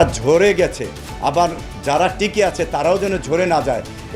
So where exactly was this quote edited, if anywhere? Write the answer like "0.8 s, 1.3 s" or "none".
none